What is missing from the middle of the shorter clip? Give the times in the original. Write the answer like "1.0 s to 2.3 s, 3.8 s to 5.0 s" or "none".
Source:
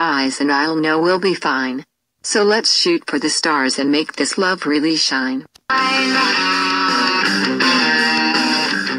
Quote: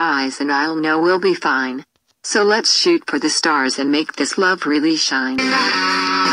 5.4 s to 6.0 s